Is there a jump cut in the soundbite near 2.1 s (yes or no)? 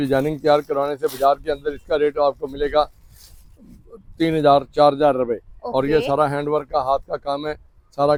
no